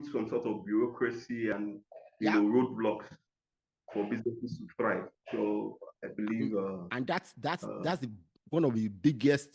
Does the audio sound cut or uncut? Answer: uncut